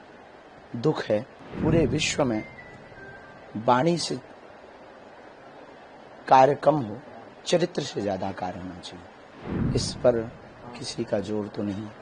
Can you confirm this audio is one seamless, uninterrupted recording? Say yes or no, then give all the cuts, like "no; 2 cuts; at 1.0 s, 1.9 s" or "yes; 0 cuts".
no; 2 cuts; at 1.4 s, 9.3 s